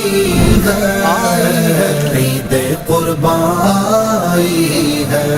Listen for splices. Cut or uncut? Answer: uncut